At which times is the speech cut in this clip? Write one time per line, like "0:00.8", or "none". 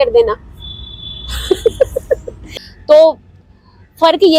0:02.4